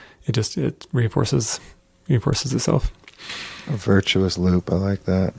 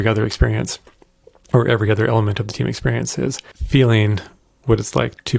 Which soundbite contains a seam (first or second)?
second